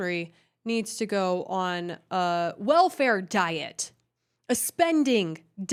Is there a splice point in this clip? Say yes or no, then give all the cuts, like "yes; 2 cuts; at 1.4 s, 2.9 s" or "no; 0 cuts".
no; 0 cuts